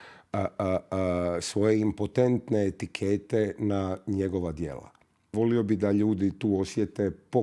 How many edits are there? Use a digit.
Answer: 1